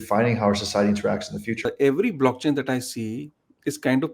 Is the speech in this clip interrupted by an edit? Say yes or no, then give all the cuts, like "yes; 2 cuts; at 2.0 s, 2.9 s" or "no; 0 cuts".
yes; 1 cut; at 1.6 s